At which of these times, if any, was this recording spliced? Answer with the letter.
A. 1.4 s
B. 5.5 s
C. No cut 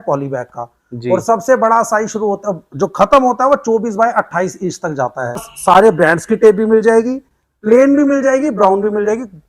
B